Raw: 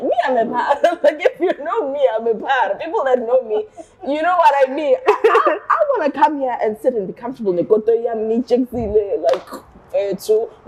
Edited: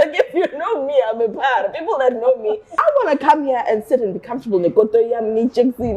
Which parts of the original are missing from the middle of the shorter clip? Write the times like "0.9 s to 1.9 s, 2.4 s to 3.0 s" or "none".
3.8 s to 5.7 s